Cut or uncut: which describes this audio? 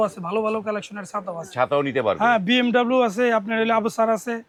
uncut